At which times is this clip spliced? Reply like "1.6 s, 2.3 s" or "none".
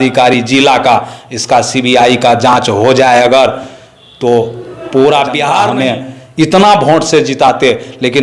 5.6 s